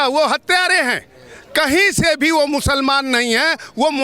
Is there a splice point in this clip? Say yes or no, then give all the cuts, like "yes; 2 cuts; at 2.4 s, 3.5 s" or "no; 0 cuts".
no; 0 cuts